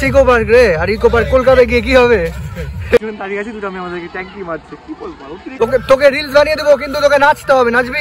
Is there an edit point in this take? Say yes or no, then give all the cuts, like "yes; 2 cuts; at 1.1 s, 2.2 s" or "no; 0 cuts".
yes; 2 cuts; at 3.0 s, 5.5 s